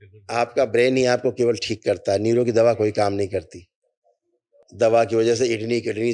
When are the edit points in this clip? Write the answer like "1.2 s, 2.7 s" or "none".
4.6 s